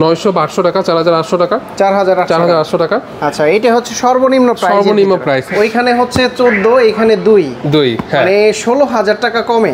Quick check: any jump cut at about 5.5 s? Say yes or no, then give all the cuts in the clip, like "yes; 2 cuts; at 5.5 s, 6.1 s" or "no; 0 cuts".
yes; 1 cut; at 5.5 s